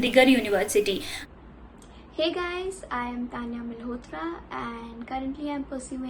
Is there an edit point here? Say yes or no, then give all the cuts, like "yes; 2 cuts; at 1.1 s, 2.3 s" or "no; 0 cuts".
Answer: yes; 1 cut; at 1.1 s